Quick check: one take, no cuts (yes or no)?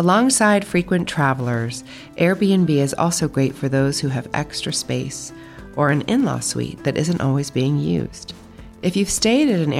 yes